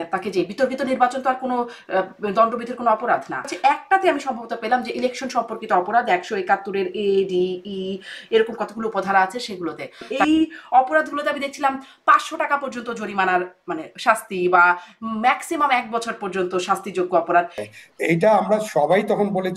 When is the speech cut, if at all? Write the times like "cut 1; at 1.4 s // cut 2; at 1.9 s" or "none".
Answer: cut 1; at 3.5 s // cut 2; at 10.1 s // cut 3; at 17.7 s